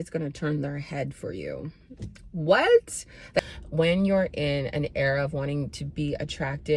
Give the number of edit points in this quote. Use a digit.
1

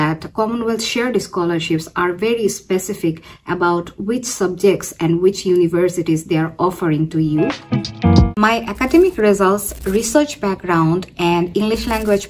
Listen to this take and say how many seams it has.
1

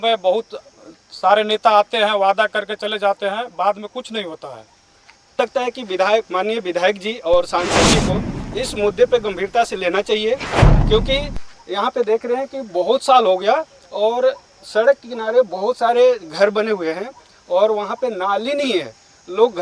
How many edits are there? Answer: 1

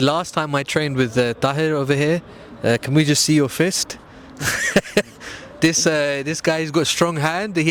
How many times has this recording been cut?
0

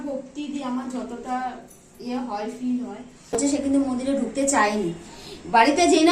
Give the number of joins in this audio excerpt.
1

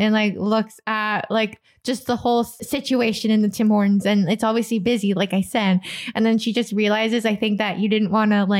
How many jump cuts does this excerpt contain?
1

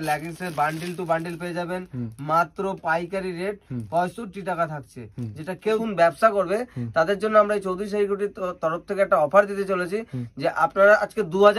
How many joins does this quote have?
1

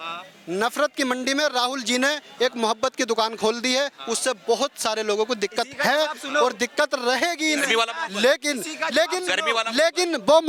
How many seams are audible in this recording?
0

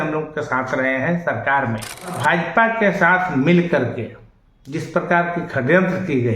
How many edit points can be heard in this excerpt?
1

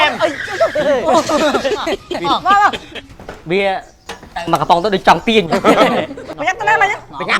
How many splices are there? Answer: 1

